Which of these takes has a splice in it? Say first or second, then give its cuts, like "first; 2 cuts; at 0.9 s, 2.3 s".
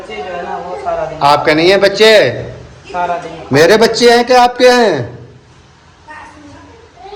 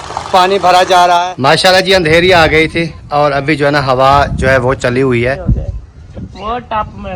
second; 2 cuts; at 1.3 s, 5.4 s